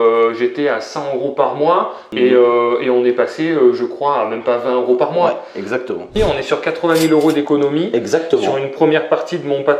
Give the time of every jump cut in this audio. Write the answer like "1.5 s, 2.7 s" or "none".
2.1 s, 6.1 s